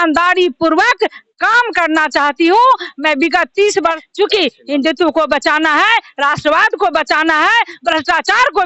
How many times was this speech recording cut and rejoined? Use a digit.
1